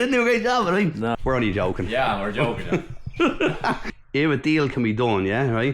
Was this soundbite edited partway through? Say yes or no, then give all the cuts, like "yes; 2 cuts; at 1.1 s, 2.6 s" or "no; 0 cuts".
yes; 2 cuts; at 1.2 s, 3.8 s